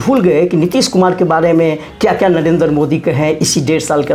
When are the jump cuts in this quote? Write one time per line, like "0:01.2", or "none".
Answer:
none

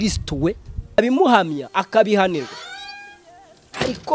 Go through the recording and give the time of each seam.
0:01.0

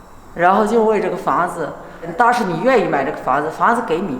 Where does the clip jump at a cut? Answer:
0:02.1

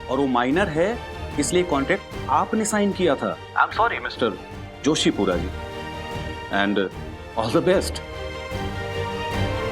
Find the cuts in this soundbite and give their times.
0:03.4

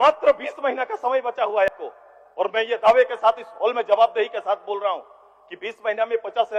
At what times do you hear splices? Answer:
0:01.7

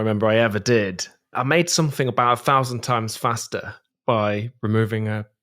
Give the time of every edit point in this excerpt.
0:01.3

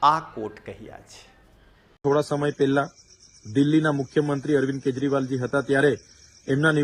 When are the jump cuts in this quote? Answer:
0:01.9

